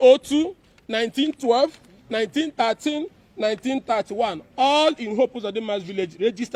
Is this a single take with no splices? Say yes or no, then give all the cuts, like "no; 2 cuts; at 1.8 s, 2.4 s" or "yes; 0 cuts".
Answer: yes; 0 cuts